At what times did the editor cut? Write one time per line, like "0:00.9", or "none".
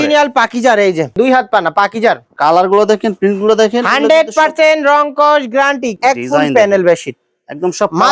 0:01.1
0:05.9